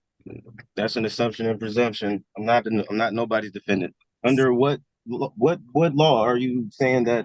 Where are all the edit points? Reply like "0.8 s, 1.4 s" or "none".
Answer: 4.0 s